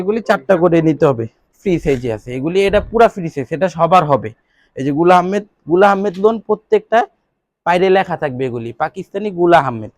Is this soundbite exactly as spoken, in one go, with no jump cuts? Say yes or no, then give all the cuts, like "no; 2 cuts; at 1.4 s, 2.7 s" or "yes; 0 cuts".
no; 1 cut; at 1.5 s